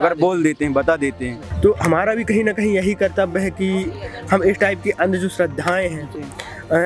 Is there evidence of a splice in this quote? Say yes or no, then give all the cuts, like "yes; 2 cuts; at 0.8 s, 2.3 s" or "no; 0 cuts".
yes; 1 cut; at 1.4 s